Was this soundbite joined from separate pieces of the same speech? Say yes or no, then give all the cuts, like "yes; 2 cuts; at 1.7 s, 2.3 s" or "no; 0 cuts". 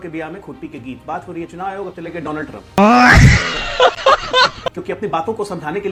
no; 0 cuts